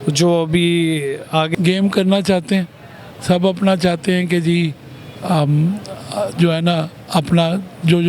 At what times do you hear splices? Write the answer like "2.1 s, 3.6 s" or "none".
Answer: 1.5 s

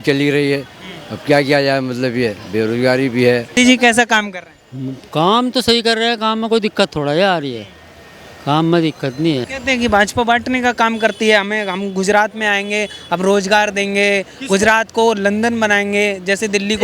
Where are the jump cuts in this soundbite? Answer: 3.5 s, 9.5 s

